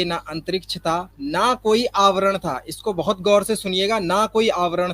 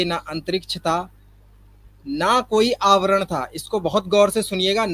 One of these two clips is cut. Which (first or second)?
first